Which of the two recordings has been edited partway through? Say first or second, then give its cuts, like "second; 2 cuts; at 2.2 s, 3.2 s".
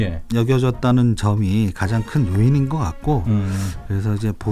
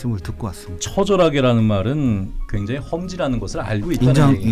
second; 1 cut; at 2.5 s